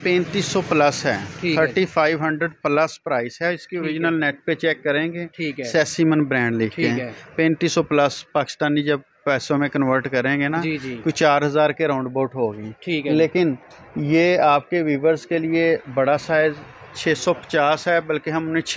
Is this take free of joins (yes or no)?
yes